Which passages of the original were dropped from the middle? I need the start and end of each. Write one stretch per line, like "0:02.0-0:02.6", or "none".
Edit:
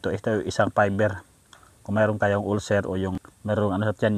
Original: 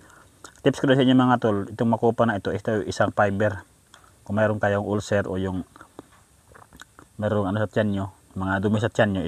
0:05.7-0:07.0